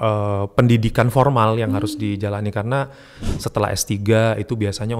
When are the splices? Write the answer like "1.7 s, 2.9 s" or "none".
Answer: 3.2 s